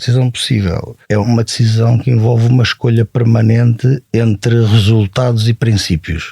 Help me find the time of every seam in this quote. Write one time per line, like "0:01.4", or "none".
0:01.1